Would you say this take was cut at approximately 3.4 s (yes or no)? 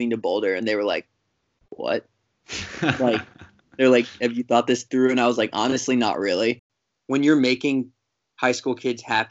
no